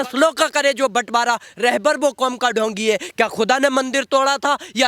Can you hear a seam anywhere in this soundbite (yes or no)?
no